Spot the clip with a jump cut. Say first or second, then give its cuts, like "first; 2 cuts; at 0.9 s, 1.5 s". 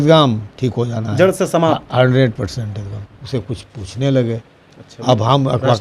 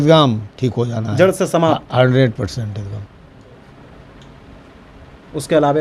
first; 1 cut; at 3.2 s